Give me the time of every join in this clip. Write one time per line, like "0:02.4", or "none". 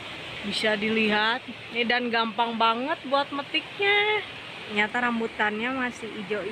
0:04.7